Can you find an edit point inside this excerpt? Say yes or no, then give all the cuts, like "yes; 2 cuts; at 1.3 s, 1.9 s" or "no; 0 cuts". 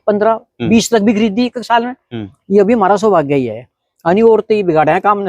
yes; 1 cut; at 2.3 s